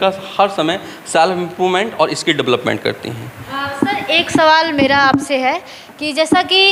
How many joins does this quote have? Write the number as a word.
zero